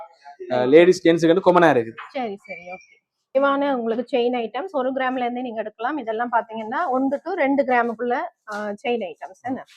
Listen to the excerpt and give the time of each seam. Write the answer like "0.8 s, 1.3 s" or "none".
3.4 s